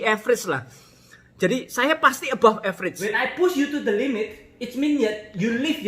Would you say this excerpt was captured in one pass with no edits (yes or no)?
no